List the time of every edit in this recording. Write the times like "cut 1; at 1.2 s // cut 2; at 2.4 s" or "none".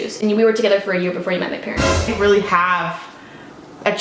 cut 1; at 2.1 s

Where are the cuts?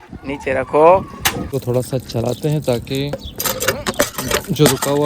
cut 1; at 1.5 s

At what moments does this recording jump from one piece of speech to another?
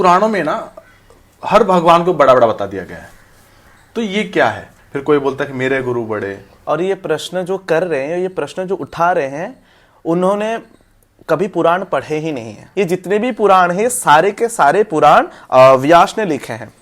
cut 1; at 4.7 s // cut 2; at 6.4 s // cut 3; at 12.6 s

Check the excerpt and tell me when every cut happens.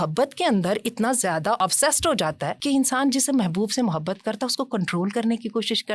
cut 1; at 2.6 s

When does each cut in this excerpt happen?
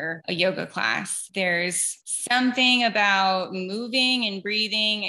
none

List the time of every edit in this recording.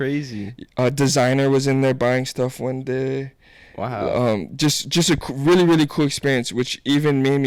none

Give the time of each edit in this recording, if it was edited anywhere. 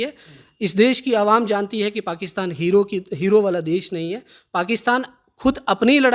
none

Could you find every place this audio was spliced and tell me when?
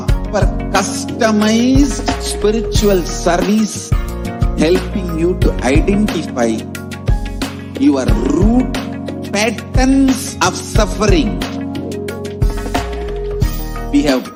none

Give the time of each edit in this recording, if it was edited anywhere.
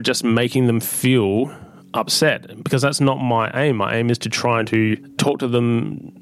cut 1; at 5.2 s

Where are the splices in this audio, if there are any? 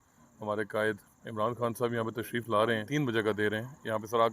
cut 1; at 2.9 s

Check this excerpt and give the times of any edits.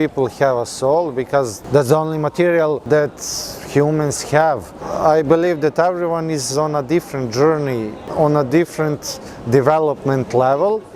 cut 1; at 1.6 s // cut 2; at 2.8 s // cut 3; at 4.9 s // cut 4; at 8.0 s

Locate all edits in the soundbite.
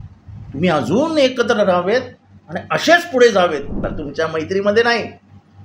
cut 1; at 3.9 s

